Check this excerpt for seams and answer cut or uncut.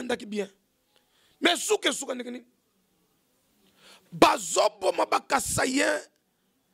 uncut